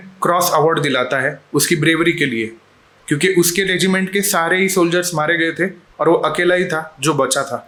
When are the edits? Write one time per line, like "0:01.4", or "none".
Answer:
none